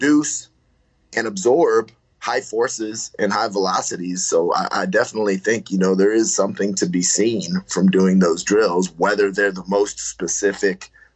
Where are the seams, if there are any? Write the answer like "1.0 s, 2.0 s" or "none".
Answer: none